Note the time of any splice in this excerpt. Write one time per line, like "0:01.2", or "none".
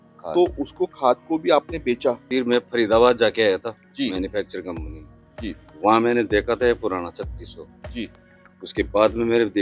0:02.2